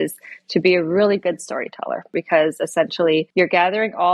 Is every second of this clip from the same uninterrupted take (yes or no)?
no